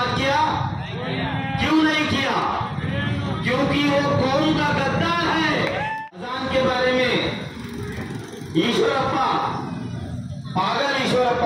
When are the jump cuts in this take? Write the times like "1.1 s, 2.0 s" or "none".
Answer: 5.9 s

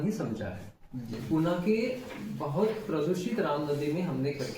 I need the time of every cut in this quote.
1.1 s

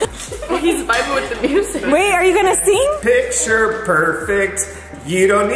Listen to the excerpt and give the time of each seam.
3.0 s

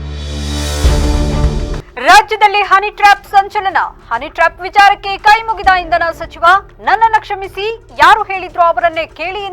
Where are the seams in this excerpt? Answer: 1.8 s

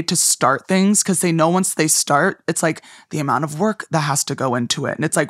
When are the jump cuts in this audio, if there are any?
none

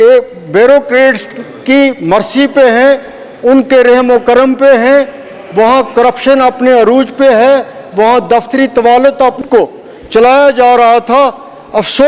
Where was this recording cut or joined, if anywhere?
9.4 s

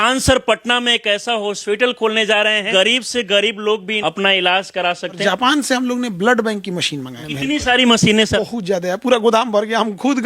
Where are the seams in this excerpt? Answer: 2.7 s, 3.9 s, 5.2 s, 7.2 s, 8.4 s

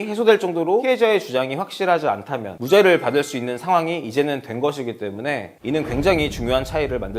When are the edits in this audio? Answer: 0.8 s, 5.5 s

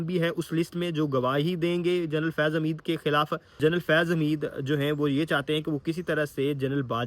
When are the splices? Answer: 3.6 s

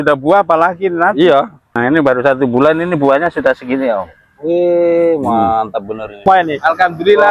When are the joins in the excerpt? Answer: 1.7 s, 6.2 s

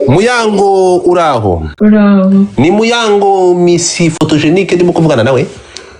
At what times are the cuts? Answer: 1.7 s

